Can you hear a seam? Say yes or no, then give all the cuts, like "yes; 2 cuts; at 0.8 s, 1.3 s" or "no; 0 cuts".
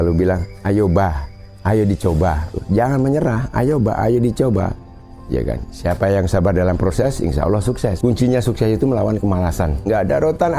yes; 2 cuts; at 2.6 s, 8.0 s